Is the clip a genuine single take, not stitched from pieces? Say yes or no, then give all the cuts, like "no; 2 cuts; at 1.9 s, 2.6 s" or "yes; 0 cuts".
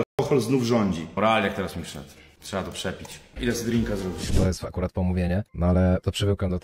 no; 2 cuts; at 1.1 s, 4.3 s